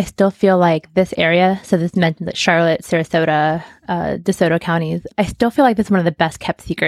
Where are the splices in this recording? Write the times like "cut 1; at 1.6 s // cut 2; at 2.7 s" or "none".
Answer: cut 1; at 5.0 s